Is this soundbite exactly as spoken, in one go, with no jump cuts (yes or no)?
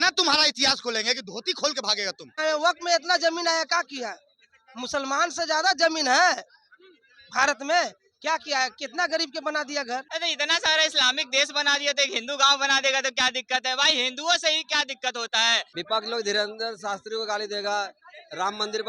no